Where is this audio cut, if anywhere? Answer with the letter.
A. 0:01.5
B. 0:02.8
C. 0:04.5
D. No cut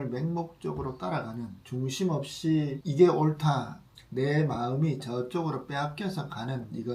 B